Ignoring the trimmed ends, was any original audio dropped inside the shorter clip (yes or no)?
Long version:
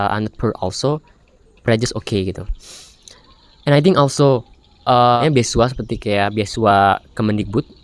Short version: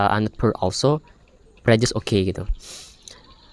no